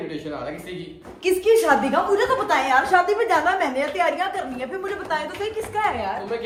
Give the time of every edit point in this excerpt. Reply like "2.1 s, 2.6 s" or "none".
none